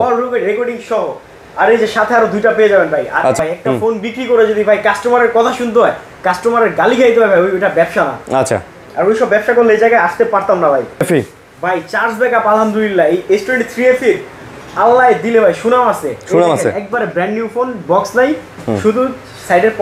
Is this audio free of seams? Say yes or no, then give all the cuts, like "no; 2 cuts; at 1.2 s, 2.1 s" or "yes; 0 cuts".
no; 2 cuts; at 3.4 s, 11.0 s